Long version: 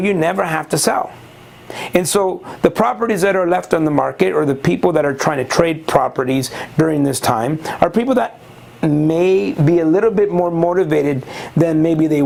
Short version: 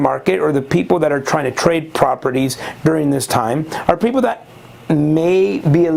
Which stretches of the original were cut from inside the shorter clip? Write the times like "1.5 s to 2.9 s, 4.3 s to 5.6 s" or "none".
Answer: none